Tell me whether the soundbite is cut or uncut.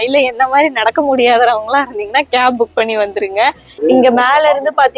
cut